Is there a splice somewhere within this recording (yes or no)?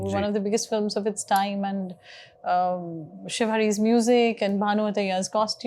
no